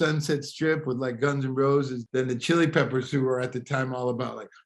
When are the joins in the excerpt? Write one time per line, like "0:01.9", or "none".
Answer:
0:02.0